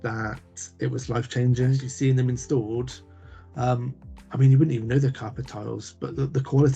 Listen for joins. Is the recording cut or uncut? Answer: cut